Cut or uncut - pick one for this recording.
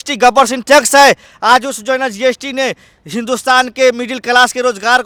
uncut